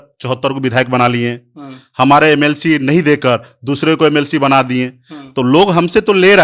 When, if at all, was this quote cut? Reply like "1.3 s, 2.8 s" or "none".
none